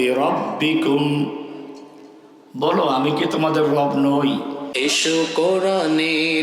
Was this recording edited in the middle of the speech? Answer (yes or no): yes